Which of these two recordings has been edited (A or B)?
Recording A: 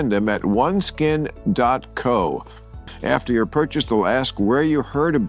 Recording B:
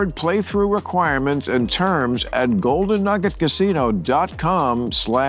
A